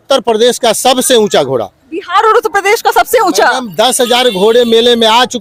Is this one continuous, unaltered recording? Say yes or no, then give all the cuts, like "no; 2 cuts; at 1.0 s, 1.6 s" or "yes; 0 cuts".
yes; 0 cuts